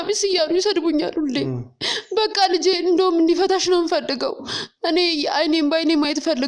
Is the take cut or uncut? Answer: uncut